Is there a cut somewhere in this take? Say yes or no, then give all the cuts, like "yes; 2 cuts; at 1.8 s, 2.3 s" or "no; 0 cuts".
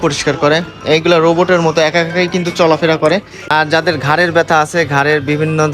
yes; 1 cut; at 3.4 s